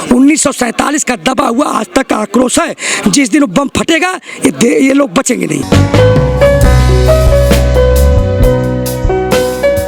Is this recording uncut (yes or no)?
yes